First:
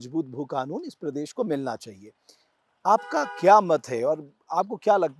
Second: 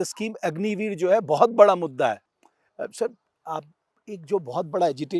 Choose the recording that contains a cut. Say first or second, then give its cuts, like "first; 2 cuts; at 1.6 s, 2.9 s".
second; 1 cut; at 2.3 s